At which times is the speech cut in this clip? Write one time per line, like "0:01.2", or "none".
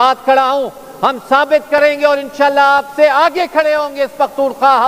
none